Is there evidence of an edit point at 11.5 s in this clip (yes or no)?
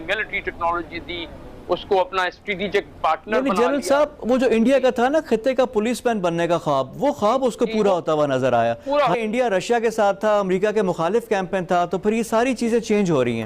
no